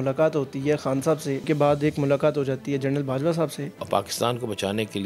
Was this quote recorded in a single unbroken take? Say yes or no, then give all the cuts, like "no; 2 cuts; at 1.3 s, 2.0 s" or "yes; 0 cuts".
no; 2 cuts; at 1.4 s, 3.8 s